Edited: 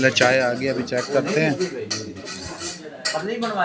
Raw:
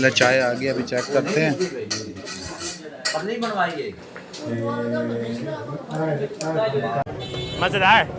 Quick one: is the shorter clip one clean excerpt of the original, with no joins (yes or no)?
yes